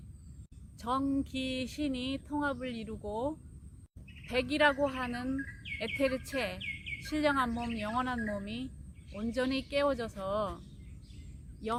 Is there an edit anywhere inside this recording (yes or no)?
no